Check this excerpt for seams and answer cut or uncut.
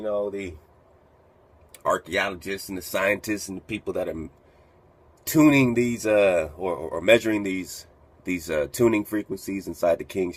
cut